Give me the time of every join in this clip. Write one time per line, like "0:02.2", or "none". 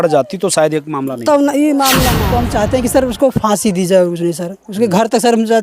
0:02.2